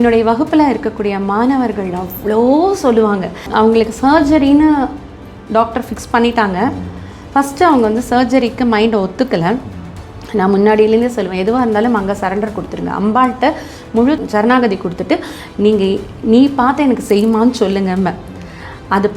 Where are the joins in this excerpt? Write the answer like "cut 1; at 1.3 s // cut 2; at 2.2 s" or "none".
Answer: cut 1; at 3.5 s // cut 2; at 14.2 s